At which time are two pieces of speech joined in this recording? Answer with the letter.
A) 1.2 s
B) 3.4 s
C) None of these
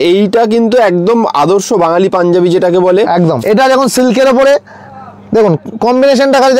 B